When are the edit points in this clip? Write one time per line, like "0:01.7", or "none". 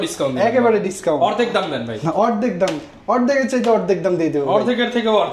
none